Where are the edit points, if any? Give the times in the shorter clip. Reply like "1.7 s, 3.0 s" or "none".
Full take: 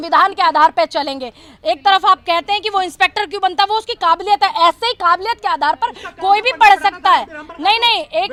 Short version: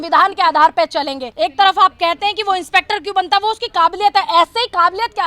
1.2 s

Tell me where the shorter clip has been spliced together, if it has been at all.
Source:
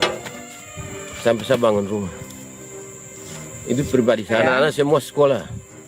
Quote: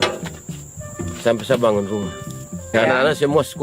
2.7 s

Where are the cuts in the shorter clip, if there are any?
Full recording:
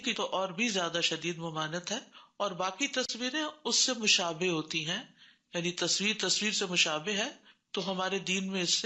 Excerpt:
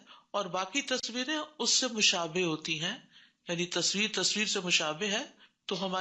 none

